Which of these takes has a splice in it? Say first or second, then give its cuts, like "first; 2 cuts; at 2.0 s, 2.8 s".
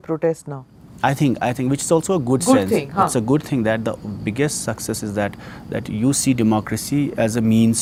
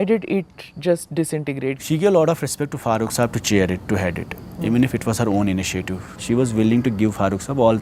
second; 2 cuts; at 1.8 s, 6.1 s